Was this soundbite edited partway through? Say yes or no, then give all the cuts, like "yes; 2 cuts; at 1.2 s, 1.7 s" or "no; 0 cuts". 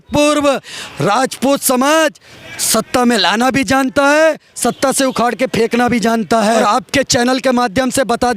yes; 1 cut; at 6.5 s